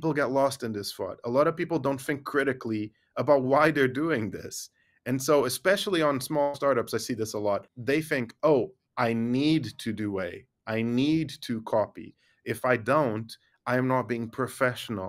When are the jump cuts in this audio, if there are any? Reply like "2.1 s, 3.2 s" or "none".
7.7 s